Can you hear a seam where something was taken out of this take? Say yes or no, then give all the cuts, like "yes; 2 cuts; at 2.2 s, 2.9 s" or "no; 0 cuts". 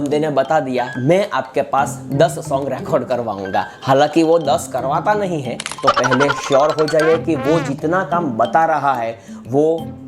yes; 2 cuts; at 0.9 s, 5.7 s